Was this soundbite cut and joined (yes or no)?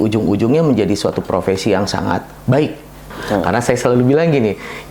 yes